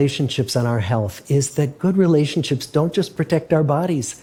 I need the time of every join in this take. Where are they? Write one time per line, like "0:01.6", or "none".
none